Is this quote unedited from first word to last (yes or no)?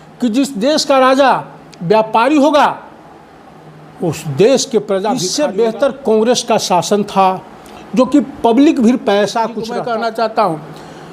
no